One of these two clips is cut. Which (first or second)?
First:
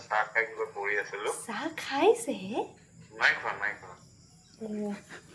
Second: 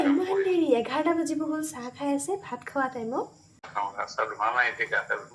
second